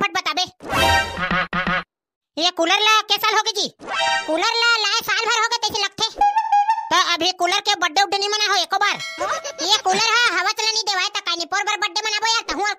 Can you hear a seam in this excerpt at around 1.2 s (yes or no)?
yes